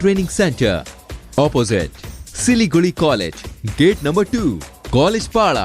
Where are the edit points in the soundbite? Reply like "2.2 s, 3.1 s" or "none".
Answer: none